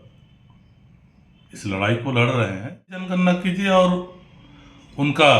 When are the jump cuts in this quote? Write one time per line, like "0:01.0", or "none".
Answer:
0:03.1